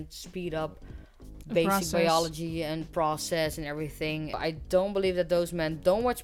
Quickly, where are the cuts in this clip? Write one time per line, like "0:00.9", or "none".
0:04.4